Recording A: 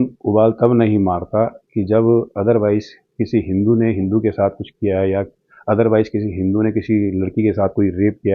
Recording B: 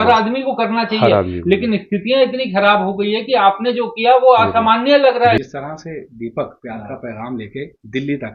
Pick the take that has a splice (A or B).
B